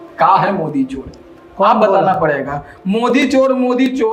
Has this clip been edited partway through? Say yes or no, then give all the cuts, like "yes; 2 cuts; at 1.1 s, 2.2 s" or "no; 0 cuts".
no; 0 cuts